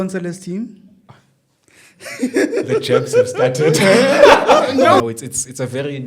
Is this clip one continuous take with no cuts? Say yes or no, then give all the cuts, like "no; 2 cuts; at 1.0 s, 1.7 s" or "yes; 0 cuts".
no; 1 cut; at 5.0 s